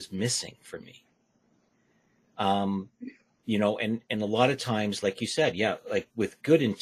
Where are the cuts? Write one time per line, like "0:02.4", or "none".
none